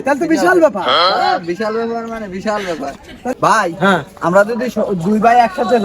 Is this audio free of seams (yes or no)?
no